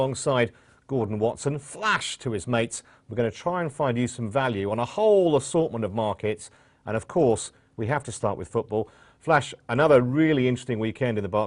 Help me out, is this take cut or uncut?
uncut